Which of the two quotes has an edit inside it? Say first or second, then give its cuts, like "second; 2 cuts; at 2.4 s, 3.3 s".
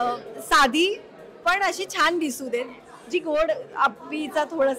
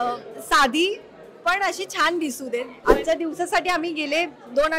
second; 1 cut; at 2.7 s